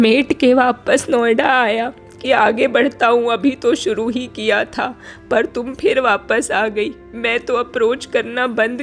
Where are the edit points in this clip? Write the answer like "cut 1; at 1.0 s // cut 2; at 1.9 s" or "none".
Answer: none